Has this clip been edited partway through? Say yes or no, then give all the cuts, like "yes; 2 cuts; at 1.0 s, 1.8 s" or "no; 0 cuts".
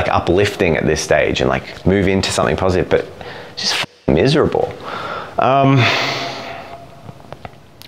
no; 0 cuts